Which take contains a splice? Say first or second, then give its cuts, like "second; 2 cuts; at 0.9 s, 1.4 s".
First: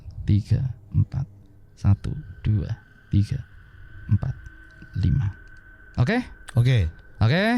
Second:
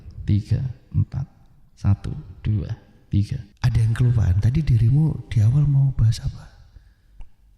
second; 1 cut; at 3.5 s